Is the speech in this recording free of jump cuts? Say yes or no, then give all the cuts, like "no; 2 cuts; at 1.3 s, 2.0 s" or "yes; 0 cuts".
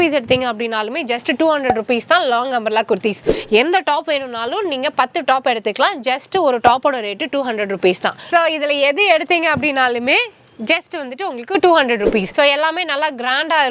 no; 3 cuts; at 3.3 s, 8.3 s, 12.3 s